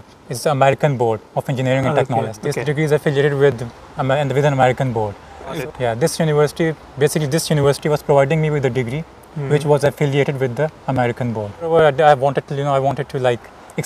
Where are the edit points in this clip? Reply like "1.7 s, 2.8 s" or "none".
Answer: 2.4 s, 5.6 s, 11.7 s